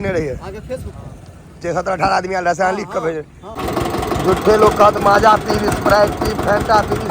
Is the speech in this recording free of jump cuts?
no; 1 cut; at 3.6 s

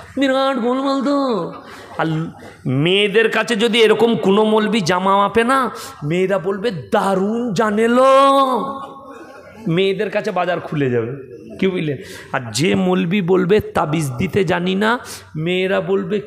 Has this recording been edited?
no; 0 cuts

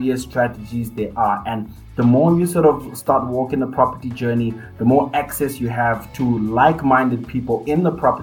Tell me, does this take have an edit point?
no; 0 cuts

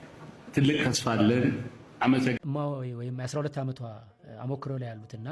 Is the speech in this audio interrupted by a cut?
yes; 1 cut; at 2.3 s

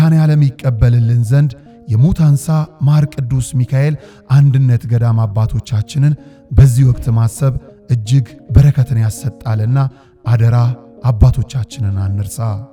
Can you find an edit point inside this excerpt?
no; 0 cuts

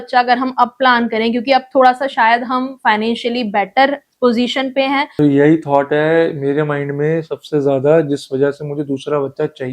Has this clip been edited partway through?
yes; 1 cut; at 5.1 s

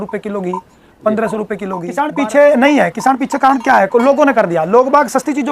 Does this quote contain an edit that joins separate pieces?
yes; 1 cut; at 1.8 s

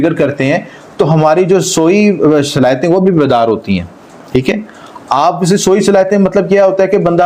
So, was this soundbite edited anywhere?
no; 0 cuts

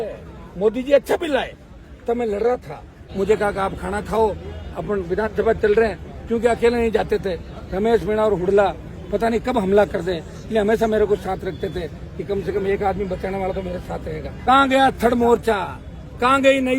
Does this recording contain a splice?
yes; 2 cuts; at 3.0 s, 14.3 s

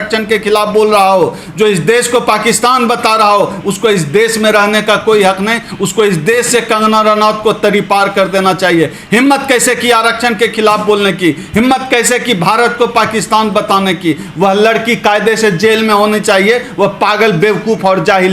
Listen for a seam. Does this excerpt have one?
no; 0 cuts

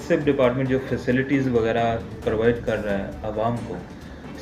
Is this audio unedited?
yes; 0 cuts

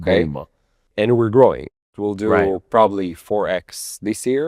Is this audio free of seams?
no; 2 cuts; at 0.9 s, 1.8 s

